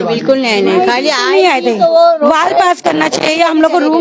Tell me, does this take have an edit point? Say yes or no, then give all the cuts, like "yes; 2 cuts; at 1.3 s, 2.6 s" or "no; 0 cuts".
no; 0 cuts